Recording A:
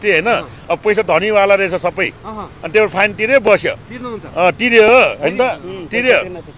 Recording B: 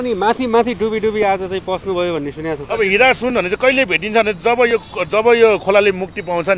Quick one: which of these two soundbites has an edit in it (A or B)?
B